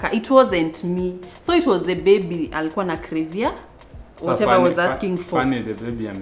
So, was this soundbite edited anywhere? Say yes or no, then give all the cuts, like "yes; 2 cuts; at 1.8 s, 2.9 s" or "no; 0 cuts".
no; 0 cuts